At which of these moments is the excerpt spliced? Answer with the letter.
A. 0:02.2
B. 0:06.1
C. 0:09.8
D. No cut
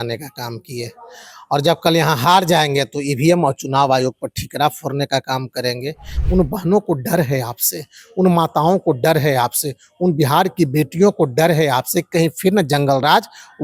B